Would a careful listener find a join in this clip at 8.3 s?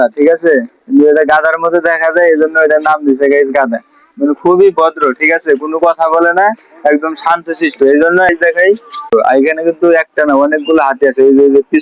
yes; 1 cut; at 8.3 s

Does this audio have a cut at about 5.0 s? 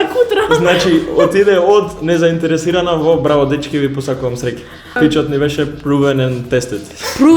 yes; 1 cut; at 5.0 s

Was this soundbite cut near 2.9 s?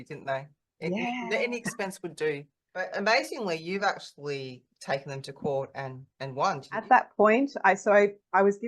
yes; 2 cuts; at 2.9 s, 6.8 s

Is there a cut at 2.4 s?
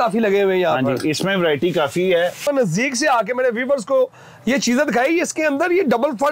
yes; 1 cut; at 2.4 s

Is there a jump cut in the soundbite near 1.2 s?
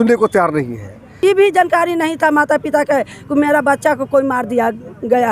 yes; 1 cut; at 1.2 s

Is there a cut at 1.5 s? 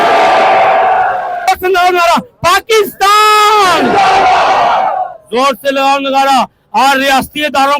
yes; 1 cut; at 1.5 s

